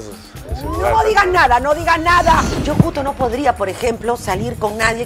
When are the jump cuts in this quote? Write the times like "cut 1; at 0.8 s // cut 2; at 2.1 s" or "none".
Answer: cut 1; at 2.5 s